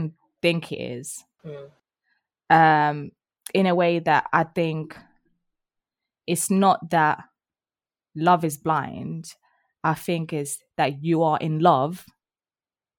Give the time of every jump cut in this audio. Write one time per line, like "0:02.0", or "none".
none